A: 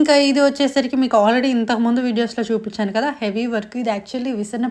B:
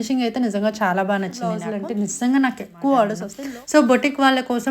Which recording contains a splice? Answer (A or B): B